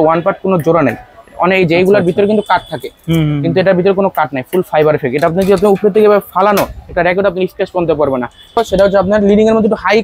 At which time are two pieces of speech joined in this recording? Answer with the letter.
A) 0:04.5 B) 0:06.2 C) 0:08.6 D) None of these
C